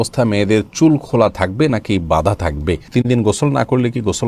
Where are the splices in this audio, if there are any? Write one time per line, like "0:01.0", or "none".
0:02.9